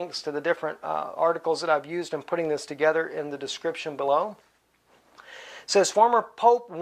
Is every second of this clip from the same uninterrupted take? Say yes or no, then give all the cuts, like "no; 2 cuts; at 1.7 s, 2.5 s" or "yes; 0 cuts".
yes; 0 cuts